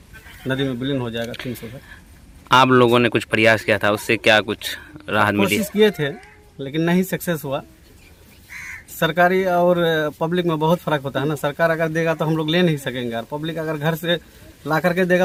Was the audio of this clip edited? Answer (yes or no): no